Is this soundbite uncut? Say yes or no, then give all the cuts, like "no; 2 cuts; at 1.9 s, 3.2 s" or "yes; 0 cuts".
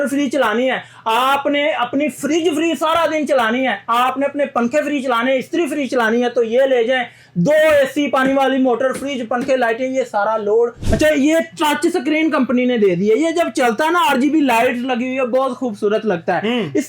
no; 1 cut; at 10.8 s